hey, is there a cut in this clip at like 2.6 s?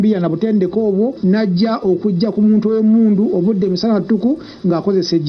no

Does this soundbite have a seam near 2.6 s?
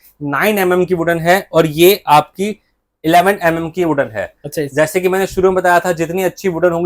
no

